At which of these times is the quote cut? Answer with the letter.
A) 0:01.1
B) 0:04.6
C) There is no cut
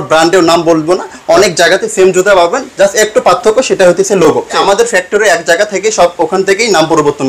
B